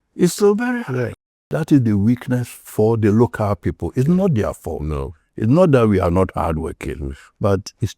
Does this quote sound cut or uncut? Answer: cut